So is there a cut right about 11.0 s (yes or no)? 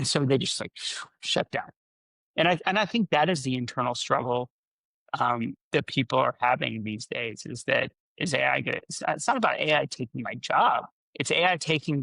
yes